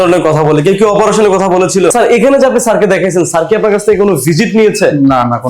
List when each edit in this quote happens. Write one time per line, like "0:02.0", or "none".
0:01.9